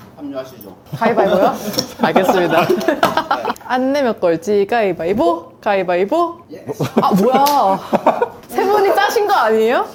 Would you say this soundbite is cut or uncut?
uncut